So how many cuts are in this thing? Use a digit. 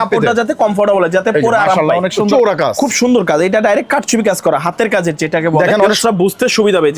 2